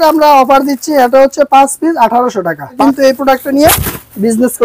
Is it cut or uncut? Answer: cut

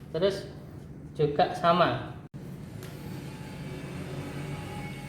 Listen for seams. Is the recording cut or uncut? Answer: cut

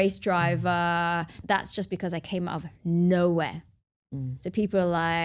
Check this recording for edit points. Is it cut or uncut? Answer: cut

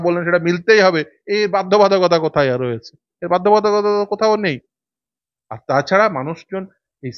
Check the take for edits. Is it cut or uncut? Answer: uncut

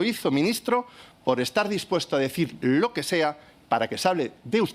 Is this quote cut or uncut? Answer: uncut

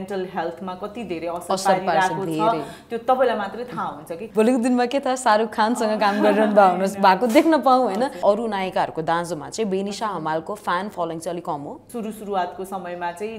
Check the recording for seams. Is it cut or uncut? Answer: cut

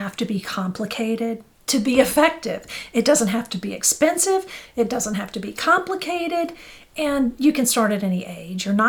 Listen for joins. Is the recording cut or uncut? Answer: uncut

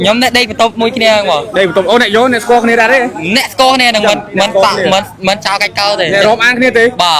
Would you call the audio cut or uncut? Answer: uncut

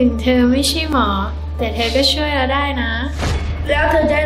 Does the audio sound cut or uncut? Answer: uncut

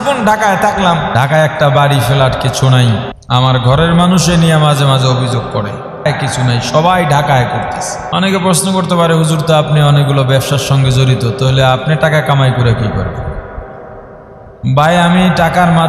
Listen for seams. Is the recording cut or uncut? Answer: cut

